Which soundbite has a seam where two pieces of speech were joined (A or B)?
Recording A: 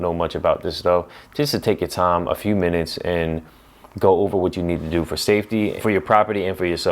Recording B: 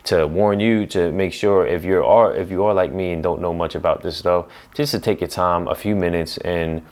A